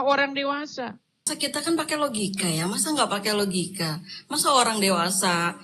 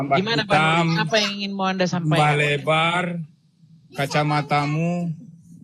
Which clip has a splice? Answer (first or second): first